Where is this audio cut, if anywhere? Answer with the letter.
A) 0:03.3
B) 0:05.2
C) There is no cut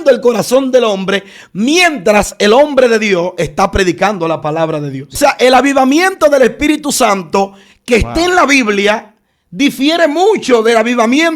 B